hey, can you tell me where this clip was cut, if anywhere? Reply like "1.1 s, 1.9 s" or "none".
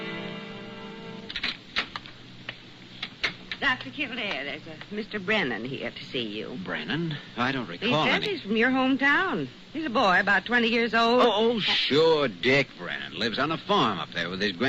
none